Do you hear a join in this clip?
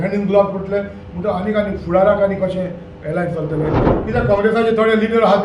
yes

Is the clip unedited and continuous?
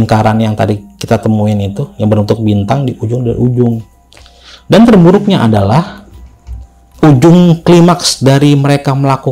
yes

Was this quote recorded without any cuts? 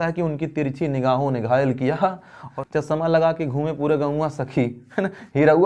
no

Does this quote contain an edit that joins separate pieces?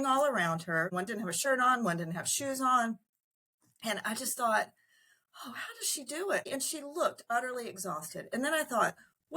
yes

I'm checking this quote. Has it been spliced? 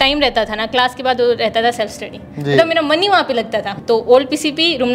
no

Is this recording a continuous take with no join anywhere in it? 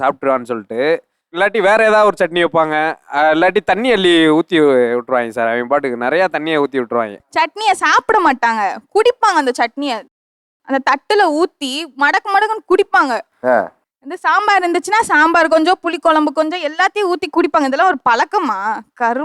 no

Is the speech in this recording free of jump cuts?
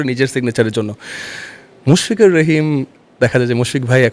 yes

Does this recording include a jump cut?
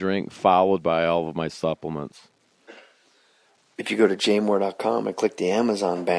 yes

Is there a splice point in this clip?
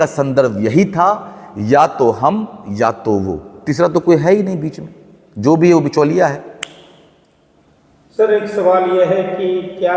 no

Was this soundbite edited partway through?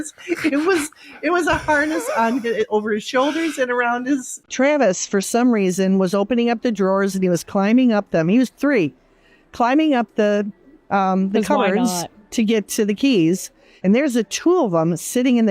yes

